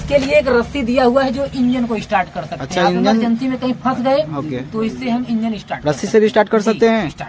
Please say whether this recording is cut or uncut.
uncut